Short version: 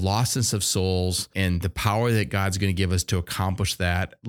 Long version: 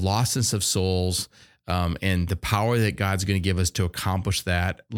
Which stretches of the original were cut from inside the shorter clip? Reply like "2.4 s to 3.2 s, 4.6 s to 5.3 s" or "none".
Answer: 1.3 s to 2.0 s